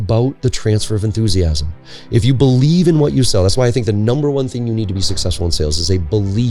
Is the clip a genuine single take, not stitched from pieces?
yes; 0 cuts

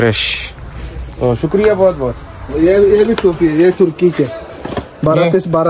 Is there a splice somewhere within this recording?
yes; 1 cut; at 2.4 s

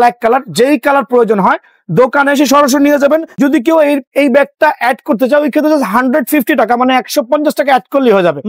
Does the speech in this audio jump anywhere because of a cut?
yes; 1 cut; at 3.3 s

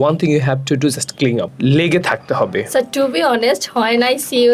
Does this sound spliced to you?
yes; 1 cut; at 1.5 s

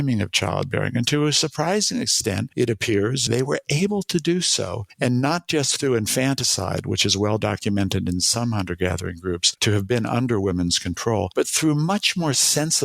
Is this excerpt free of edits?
no; 3 cuts; at 3.3 s, 4.8 s, 9.5 s

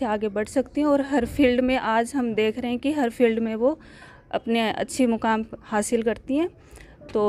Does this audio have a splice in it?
no; 0 cuts

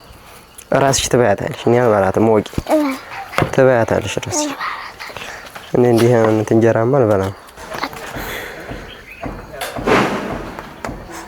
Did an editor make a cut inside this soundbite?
yes; 1 cut; at 8.0 s

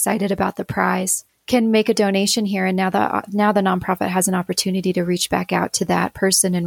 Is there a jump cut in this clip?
yes; 1 cut; at 1.2 s

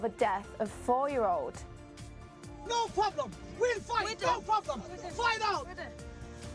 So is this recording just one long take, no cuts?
yes; 0 cuts

